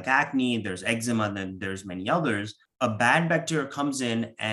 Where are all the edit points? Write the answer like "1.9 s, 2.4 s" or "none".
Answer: 2.6 s

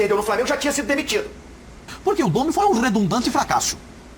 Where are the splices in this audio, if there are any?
1.9 s

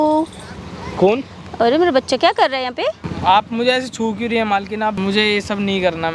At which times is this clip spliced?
3.1 s, 5.0 s

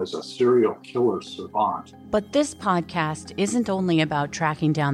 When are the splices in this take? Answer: 1.9 s

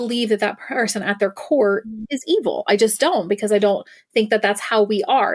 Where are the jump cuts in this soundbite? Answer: none

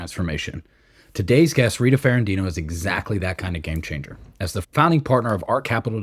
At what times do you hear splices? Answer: 4.6 s

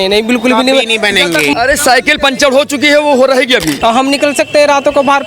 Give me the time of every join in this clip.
1.5 s, 3.8 s

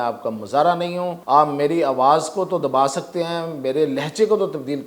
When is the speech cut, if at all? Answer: 1.2 s

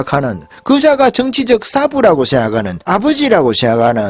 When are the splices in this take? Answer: 2.8 s

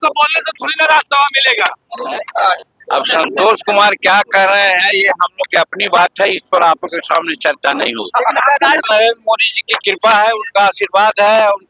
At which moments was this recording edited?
8.8 s

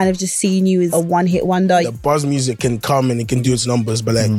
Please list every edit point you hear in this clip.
0.9 s, 1.9 s, 3.4 s

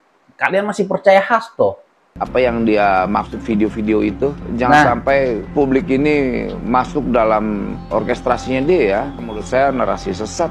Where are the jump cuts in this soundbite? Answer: 2.2 s

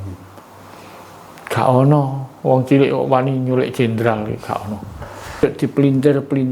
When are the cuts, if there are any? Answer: 5.4 s

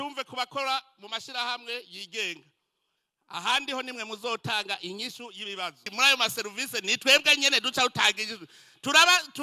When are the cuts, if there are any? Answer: 5.9 s

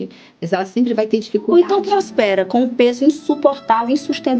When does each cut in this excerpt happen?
none

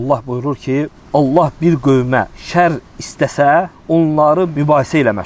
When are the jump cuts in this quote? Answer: 1.0 s, 2.4 s, 4.3 s

